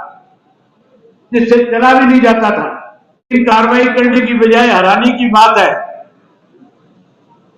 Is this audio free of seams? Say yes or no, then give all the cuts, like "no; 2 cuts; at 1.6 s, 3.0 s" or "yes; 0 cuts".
no; 1 cut; at 3.3 s